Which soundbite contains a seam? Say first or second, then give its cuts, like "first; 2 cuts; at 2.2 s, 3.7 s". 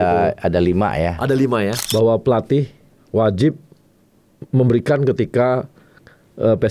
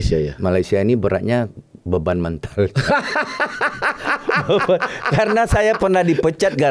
first; 1 cut; at 1.8 s